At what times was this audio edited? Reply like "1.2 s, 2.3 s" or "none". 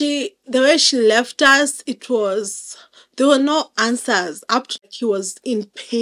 4.8 s